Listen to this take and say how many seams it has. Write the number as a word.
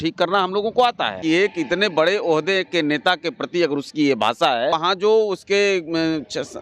two